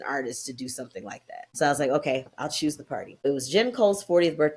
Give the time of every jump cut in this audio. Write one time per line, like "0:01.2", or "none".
0:01.5
0:03.3